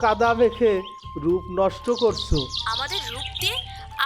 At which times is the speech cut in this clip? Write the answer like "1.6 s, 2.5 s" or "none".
2.6 s

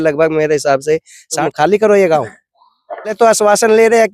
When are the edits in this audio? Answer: 1.4 s, 3.1 s

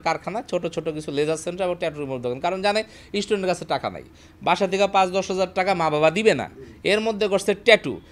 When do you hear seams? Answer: none

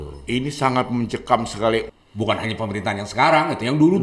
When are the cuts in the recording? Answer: 1.9 s

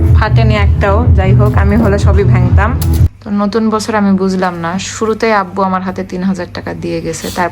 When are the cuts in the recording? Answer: 3.2 s

